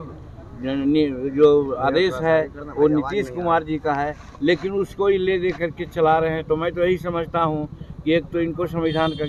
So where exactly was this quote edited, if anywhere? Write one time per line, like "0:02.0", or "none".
none

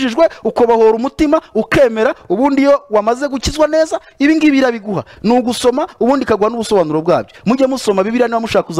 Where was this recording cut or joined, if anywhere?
none

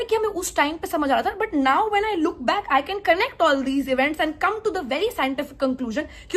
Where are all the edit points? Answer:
none

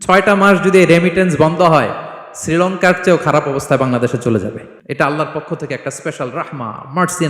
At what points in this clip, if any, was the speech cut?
0:04.7

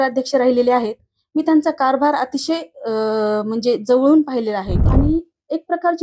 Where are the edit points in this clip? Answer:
0:04.8

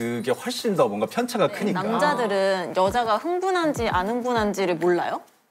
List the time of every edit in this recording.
0:01.8

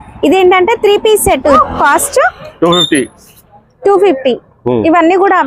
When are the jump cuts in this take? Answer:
0:01.6

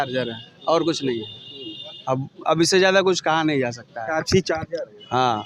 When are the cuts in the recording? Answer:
none

